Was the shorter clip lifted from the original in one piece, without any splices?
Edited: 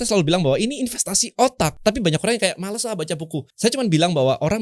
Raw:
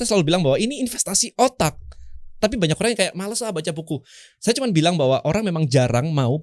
no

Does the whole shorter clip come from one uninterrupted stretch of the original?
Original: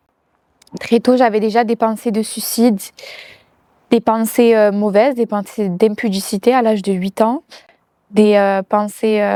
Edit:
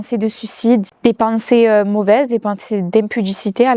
no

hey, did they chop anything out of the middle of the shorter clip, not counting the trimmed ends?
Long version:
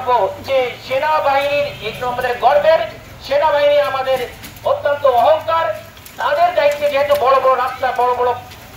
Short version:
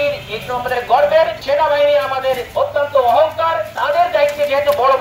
yes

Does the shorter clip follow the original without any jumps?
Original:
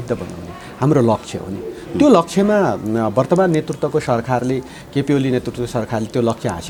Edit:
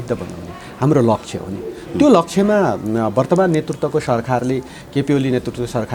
yes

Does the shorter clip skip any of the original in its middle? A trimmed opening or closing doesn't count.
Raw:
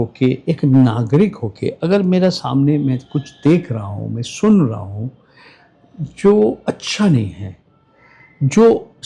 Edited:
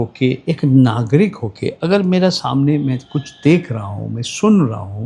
no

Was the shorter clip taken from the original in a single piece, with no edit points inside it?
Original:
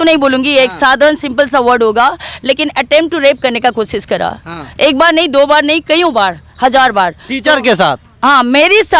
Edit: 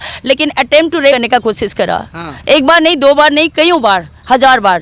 no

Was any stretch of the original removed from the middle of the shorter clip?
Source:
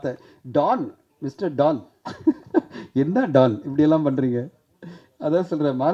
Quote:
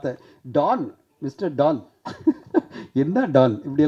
no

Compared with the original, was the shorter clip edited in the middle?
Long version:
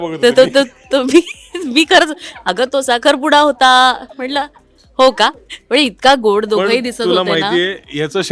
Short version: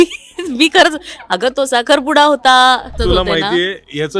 yes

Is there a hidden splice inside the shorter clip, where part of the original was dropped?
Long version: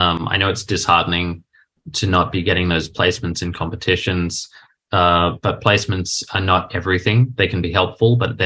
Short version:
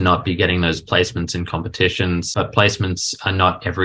yes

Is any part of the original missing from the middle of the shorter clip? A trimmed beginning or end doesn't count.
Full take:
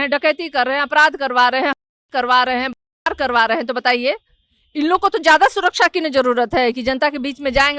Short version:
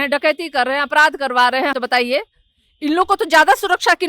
yes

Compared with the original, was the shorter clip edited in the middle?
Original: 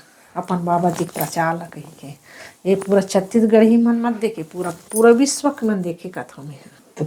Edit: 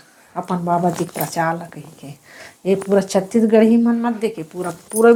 no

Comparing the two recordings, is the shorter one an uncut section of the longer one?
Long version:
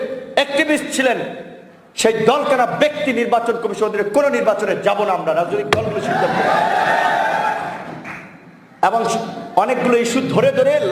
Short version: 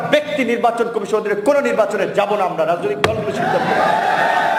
yes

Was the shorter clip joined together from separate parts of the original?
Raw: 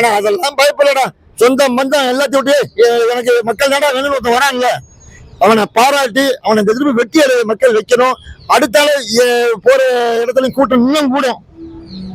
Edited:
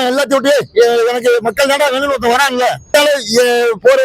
yes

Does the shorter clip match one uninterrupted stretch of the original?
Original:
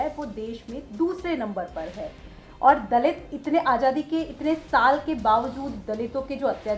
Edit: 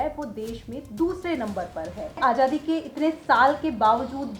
no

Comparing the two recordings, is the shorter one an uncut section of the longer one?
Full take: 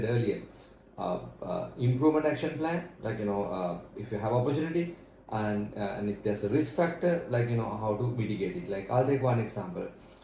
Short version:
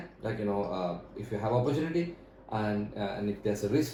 yes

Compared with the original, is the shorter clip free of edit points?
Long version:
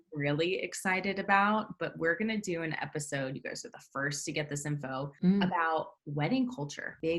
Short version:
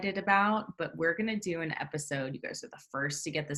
yes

